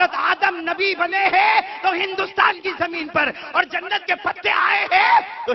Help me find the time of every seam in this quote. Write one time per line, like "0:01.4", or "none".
none